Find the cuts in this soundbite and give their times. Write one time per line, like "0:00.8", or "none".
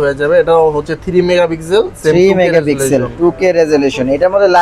none